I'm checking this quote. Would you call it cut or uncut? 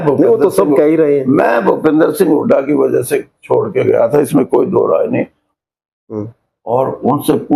cut